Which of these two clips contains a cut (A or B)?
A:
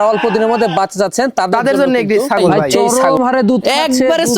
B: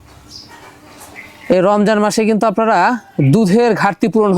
A